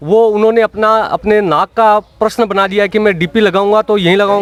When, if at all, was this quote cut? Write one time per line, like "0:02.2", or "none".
none